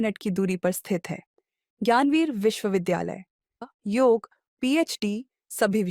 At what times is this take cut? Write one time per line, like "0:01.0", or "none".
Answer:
0:03.6